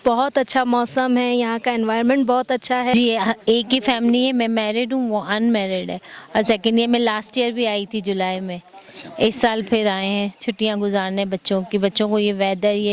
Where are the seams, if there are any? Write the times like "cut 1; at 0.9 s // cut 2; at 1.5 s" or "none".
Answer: cut 1; at 2.9 s